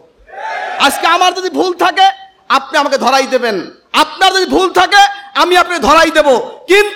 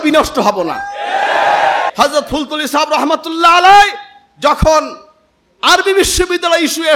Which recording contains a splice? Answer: second; 1 cut; at 1.9 s

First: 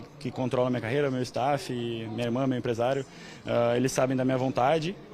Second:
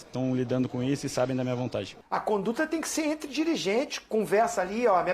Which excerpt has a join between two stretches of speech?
second; 1 cut; at 2.0 s

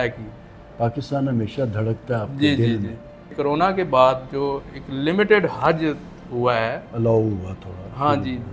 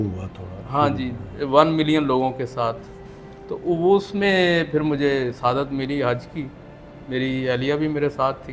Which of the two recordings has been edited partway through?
first; 1 cut; at 3.3 s

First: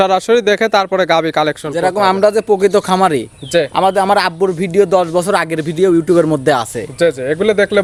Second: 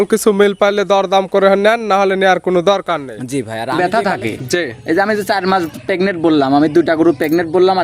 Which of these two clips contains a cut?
second; 1 cut; at 3.7 s

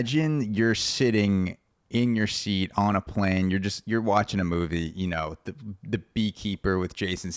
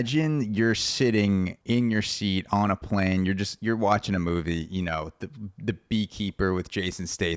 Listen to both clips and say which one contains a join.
second; 1 cut; at 1.6 s

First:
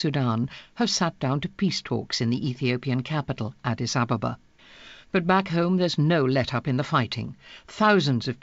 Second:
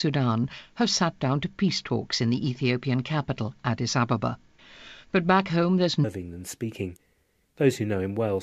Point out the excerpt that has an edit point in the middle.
first; 1 cut; at 6.0 s

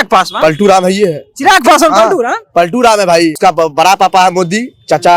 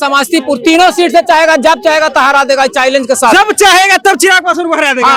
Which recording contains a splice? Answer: first; 1 cut; at 3.4 s

